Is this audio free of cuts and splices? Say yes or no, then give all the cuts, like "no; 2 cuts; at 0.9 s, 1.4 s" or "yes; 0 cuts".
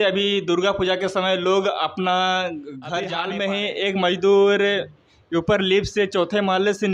no; 1 cut; at 3.1 s